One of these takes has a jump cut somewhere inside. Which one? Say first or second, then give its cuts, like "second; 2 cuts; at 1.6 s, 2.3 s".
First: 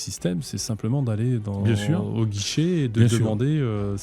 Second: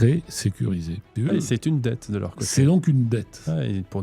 second; 1 cut; at 1.1 s